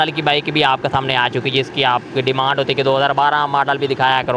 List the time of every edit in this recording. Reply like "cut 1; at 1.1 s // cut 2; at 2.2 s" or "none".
none